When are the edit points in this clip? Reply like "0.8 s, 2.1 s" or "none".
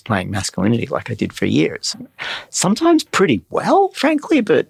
1.9 s

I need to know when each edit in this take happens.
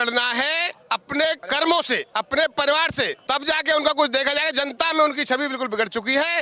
1.4 s, 2.1 s, 3.2 s

